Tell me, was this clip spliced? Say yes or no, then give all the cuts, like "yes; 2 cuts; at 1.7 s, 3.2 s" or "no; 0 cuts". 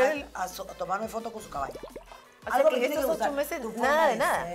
yes; 1 cut; at 2.0 s